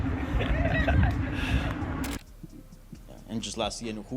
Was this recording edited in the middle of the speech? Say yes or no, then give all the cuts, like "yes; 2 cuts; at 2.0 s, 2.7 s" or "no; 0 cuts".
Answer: yes; 1 cut; at 2.1 s